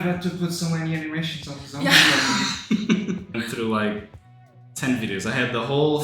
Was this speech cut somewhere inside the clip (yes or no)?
yes